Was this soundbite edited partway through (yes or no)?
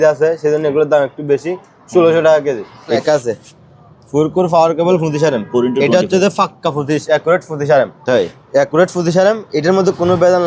yes